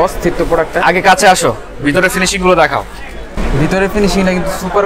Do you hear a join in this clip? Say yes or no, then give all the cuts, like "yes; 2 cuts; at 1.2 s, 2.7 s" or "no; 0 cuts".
no; 0 cuts